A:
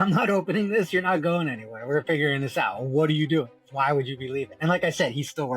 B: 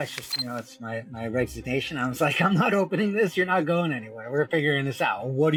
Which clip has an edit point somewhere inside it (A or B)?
A